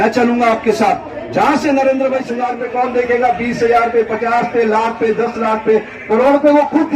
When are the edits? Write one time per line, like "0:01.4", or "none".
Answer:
0:02.4